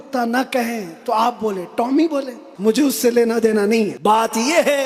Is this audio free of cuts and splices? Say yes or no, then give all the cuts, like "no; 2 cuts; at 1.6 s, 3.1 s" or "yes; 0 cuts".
no; 2 cuts; at 2.4 s, 4.0 s